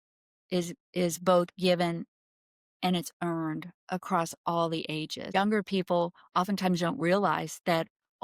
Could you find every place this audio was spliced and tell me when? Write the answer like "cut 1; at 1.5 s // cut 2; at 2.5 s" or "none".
cut 1; at 5.3 s